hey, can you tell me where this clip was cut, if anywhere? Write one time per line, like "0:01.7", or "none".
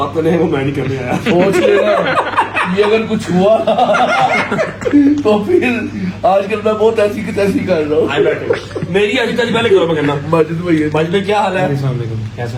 none